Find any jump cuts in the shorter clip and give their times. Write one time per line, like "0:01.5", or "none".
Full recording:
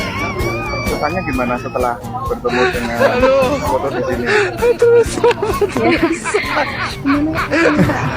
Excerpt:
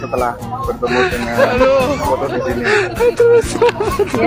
none